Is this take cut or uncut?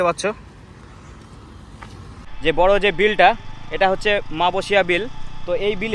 cut